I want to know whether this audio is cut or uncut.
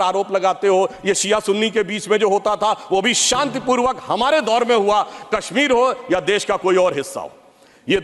uncut